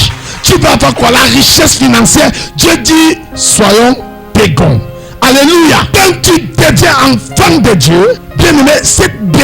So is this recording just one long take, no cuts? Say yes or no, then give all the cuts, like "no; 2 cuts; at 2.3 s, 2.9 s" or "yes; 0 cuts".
no; 2 cuts; at 5.9 s, 8.3 s